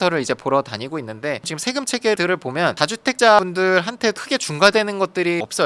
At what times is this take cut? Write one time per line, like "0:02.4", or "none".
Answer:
0:01.4